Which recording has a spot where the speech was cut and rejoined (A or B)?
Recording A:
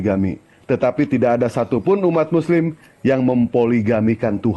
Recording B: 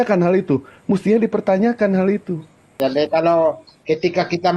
B